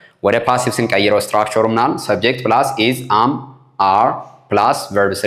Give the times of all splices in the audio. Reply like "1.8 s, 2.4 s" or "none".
none